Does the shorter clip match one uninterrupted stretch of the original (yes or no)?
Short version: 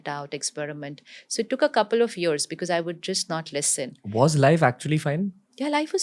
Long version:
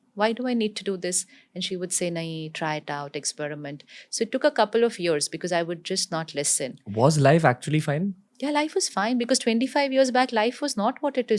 yes